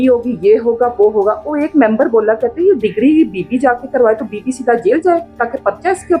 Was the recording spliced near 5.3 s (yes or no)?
no